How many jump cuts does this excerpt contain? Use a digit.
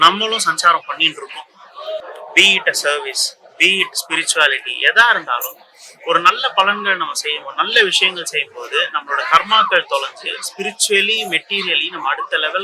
1